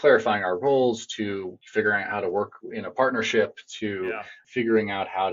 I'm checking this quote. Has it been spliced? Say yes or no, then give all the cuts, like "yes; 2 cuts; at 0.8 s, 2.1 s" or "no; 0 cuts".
yes; 2 cuts; at 1.6 s, 4.4 s